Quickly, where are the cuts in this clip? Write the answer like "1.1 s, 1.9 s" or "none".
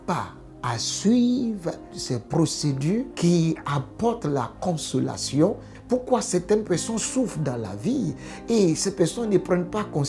2.0 s, 3.1 s, 5.7 s

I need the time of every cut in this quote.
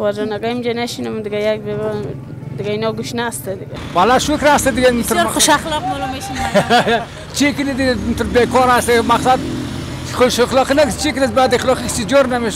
3.7 s

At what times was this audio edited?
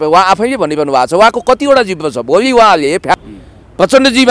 3.1 s

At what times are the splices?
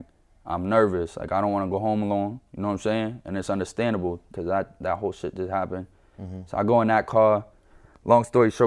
4.3 s

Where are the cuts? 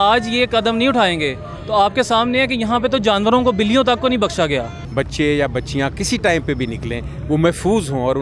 4.8 s

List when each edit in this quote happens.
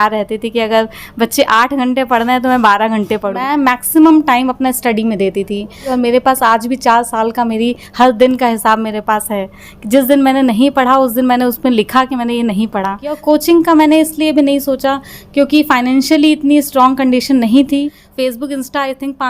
3.4 s, 5.9 s, 13.2 s, 18.0 s

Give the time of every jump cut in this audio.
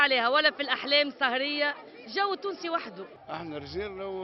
3.1 s

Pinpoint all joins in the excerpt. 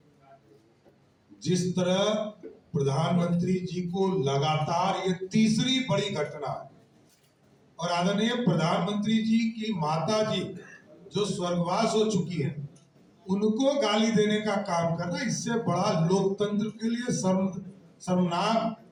none

